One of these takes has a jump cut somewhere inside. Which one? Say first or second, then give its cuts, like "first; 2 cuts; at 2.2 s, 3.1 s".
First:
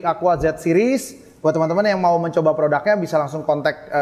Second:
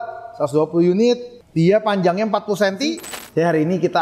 second; 1 cut; at 3.1 s